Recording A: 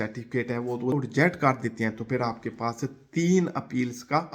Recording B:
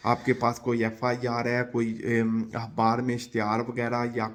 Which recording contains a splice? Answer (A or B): A